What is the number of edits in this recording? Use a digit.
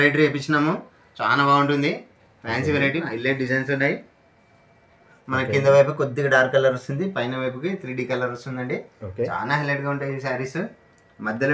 2